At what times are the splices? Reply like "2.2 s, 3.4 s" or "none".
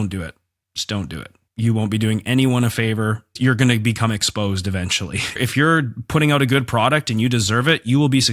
5.3 s